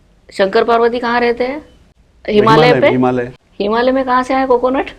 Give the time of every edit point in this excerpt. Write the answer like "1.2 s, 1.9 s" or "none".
3.3 s